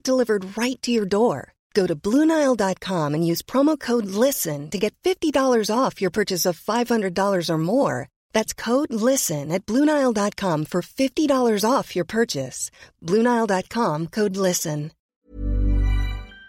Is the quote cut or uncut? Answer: cut